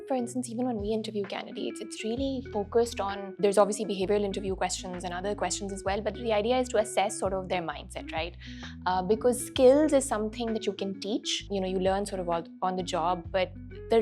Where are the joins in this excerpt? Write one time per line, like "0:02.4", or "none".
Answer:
0:03.2
0:11.4